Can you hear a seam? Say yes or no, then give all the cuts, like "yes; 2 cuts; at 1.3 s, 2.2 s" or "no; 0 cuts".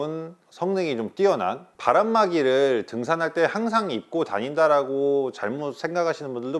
yes; 1 cut; at 1.7 s